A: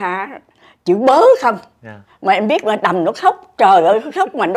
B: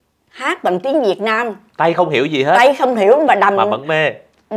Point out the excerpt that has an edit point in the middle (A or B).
B